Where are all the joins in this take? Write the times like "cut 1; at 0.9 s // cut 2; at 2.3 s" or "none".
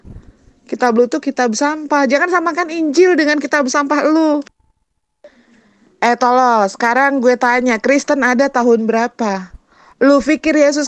cut 1; at 5.2 s